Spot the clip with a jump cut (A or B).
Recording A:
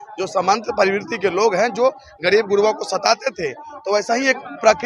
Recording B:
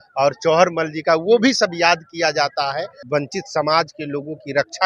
B